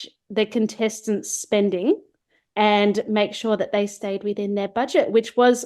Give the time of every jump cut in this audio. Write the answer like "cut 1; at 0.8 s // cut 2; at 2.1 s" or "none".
none

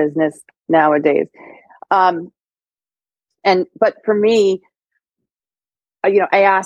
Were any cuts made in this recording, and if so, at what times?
none

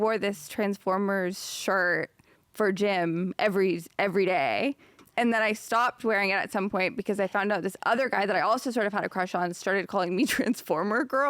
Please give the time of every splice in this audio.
cut 1; at 5.0 s

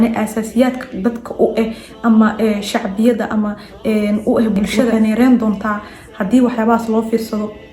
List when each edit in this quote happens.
cut 1; at 4.9 s

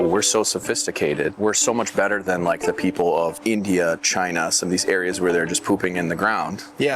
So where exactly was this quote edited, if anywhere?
cut 1; at 1.3 s // cut 2; at 3.4 s

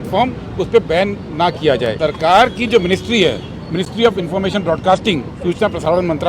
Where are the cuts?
cut 1; at 2.0 s

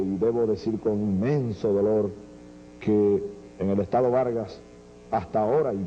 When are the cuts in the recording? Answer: none

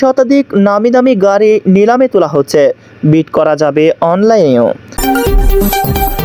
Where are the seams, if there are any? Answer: cut 1; at 4.9 s

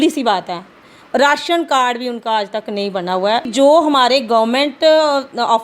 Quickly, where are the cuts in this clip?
cut 1; at 3.5 s

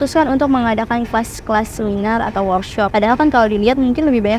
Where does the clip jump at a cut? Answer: cut 1; at 2.9 s

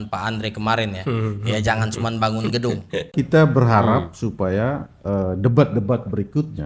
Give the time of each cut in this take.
cut 1; at 3.1 s

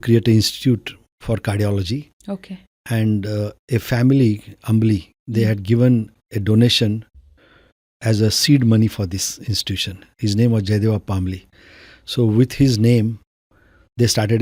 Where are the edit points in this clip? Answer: none

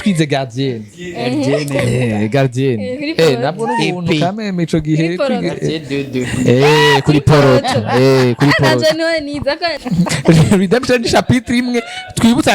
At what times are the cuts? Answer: cut 1; at 9.8 s

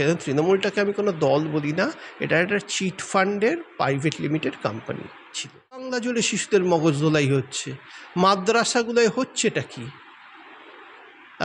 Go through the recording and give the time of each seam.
cut 1; at 5.8 s

